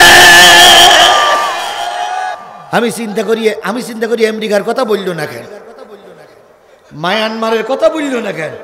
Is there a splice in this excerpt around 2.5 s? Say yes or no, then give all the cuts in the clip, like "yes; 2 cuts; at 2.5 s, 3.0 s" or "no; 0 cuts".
yes; 1 cut; at 2.5 s